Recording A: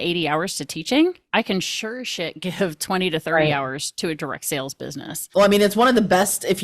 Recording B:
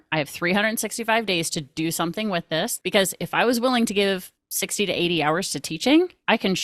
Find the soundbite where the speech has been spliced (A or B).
A